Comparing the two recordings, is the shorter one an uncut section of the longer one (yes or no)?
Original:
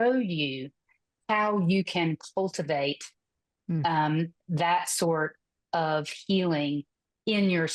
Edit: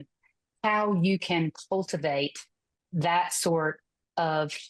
no